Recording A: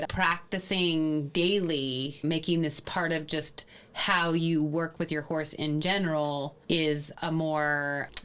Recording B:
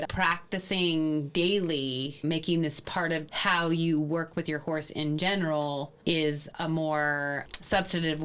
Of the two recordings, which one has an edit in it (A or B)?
B